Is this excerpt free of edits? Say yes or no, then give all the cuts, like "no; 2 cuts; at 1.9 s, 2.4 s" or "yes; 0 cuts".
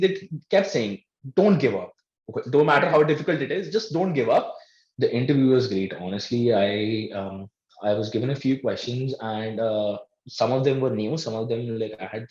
no; 1 cut; at 4.8 s